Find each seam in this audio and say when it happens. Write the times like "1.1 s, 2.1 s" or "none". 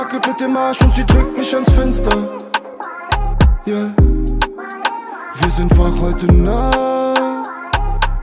none